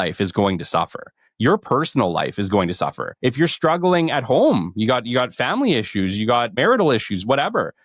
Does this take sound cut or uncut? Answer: cut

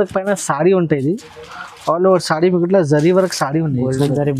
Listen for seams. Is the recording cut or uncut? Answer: uncut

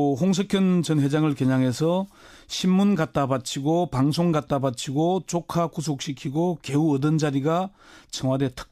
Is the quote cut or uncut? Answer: uncut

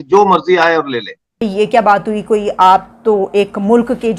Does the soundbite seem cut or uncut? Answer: cut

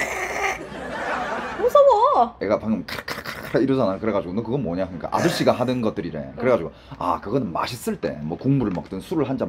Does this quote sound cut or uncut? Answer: cut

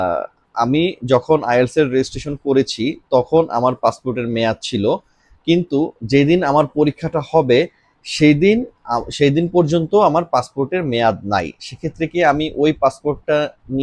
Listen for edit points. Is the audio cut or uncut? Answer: uncut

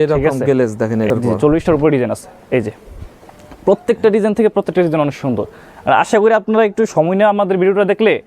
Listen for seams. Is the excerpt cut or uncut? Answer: cut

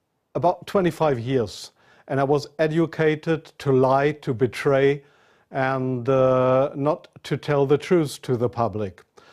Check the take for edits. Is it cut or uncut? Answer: uncut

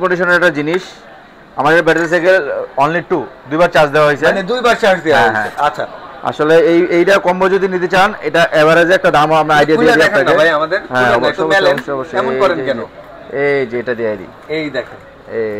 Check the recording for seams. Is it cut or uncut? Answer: uncut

